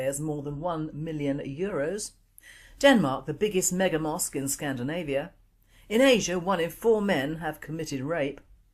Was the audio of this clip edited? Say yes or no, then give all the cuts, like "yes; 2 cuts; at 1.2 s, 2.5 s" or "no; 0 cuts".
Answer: yes; 1 cut; at 1.4 s